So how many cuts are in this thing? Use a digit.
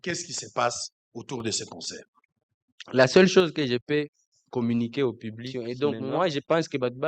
1